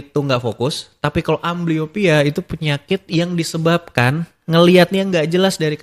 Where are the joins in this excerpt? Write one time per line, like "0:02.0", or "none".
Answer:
none